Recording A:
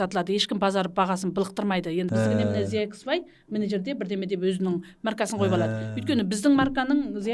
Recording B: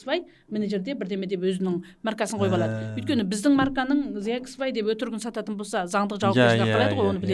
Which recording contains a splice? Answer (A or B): A